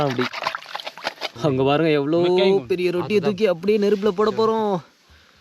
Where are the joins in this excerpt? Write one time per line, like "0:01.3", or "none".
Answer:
0:01.3

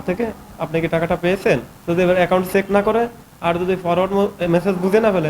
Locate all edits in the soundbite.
0:01.7

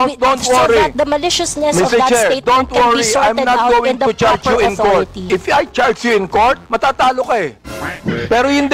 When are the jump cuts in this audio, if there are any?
0:05.2

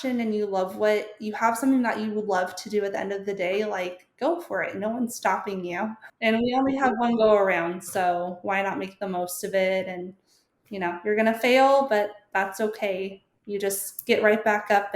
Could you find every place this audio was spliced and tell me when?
0:06.1

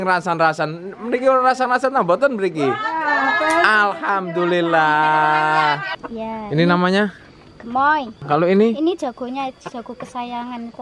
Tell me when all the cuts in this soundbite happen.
0:06.2
0:08.1

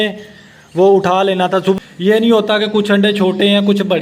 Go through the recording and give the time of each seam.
0:01.8

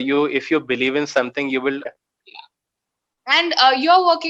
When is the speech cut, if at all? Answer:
0:01.9

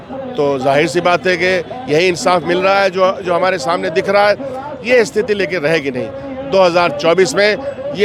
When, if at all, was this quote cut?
none

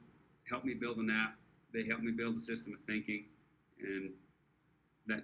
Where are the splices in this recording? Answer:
none

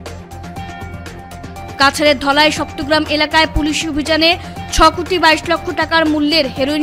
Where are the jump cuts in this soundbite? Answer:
0:01.7

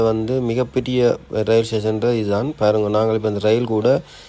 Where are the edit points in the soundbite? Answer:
none

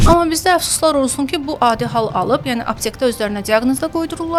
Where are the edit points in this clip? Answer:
none

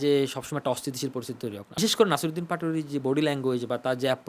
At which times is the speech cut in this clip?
0:01.8

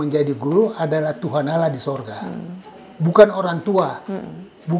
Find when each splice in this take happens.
none

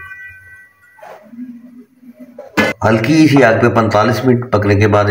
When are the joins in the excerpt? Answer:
0:02.8

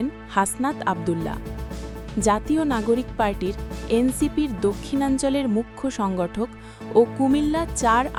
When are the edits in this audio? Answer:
none

